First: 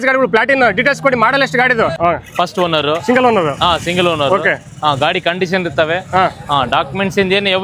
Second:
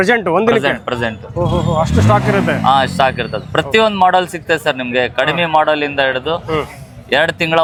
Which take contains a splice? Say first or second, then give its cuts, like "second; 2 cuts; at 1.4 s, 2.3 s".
first; 1 cut; at 2.0 s